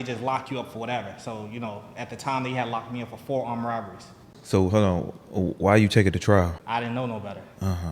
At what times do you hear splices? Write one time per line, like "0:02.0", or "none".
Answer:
0:04.2
0:06.6